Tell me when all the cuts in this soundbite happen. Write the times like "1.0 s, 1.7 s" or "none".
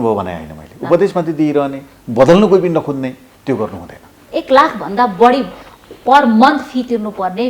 4.2 s